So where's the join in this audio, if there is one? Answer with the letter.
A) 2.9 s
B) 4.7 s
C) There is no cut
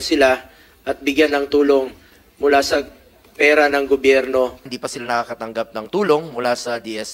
B